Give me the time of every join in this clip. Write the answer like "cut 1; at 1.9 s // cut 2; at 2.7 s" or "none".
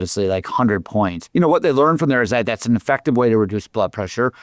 cut 1; at 1.2 s